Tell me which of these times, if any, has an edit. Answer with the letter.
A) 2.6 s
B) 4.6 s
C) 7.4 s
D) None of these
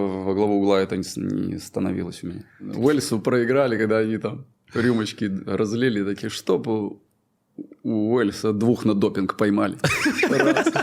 A